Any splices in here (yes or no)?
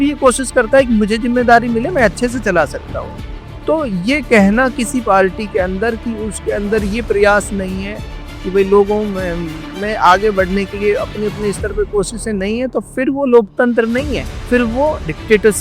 yes